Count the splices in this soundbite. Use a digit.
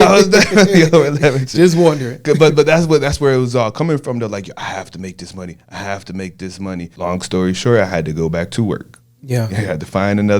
1